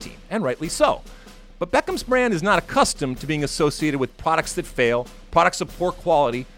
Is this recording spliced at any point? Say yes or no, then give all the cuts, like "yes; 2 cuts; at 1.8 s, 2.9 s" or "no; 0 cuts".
no; 0 cuts